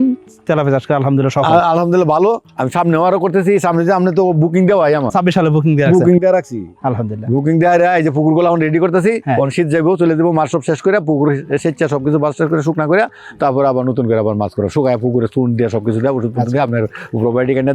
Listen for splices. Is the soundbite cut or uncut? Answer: uncut